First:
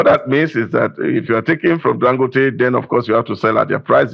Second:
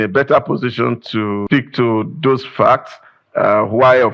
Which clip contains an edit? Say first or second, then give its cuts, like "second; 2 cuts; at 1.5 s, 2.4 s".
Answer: second; 1 cut; at 1.4 s